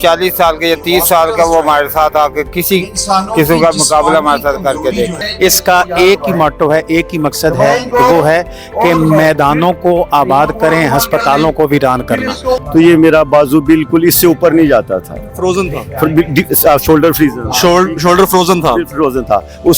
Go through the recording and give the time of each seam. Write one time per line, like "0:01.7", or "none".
0:05.2
0:12.6